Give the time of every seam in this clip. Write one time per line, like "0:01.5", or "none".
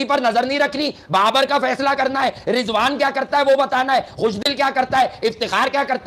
none